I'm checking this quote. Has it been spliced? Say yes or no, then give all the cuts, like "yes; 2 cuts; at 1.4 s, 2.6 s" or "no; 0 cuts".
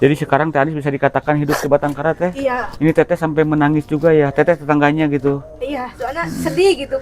no; 0 cuts